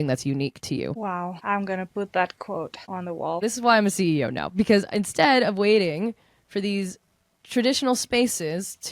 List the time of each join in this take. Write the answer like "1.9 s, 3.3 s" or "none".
1.0 s, 3.4 s